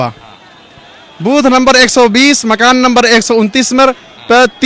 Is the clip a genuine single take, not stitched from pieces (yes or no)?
yes